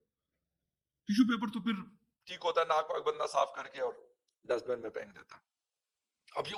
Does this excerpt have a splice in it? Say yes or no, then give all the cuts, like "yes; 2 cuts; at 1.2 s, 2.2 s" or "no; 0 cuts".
no; 0 cuts